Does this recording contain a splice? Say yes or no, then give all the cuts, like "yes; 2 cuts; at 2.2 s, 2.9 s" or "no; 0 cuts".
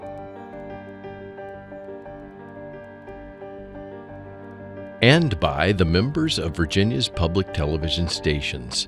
yes; 1 cut; at 5.0 s